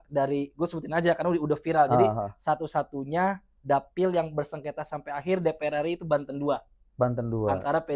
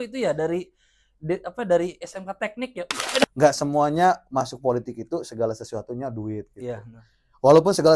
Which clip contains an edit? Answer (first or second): second